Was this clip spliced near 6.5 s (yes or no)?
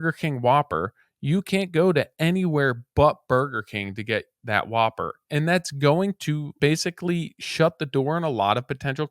yes